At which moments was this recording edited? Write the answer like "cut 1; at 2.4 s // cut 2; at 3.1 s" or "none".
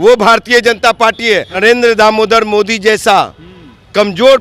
cut 1; at 1.5 s